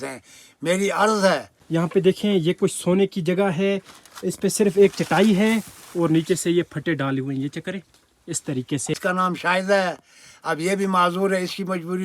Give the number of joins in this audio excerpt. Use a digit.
2